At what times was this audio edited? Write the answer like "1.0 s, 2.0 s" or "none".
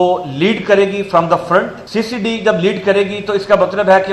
1.8 s